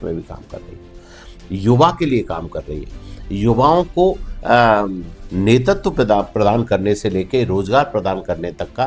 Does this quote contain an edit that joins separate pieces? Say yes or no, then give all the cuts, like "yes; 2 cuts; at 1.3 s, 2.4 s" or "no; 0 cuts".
no; 0 cuts